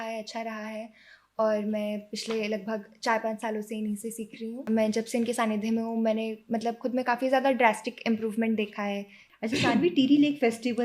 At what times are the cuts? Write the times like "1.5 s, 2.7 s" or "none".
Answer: 4.5 s, 9.2 s